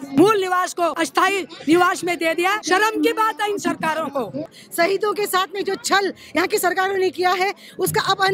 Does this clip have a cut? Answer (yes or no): yes